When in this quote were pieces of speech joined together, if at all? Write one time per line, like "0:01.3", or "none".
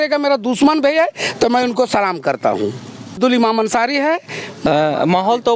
none